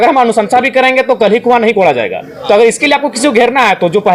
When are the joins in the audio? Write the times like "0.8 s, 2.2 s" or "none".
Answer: none

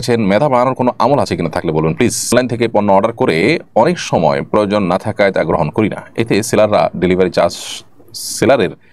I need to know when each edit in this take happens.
2.2 s

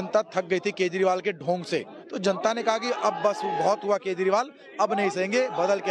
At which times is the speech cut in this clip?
2.0 s

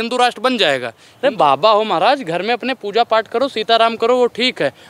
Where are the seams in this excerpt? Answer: 1.0 s

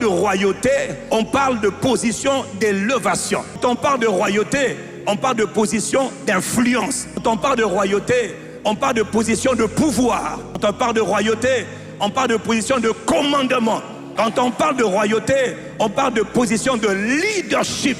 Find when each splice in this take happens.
1.0 s, 3.6 s, 7.2 s, 10.6 s, 14.0 s

